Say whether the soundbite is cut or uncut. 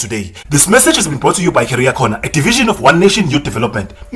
uncut